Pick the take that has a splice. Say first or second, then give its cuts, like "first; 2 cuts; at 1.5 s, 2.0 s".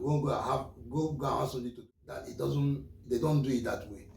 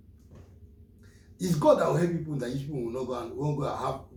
first; 1 cut; at 1.8 s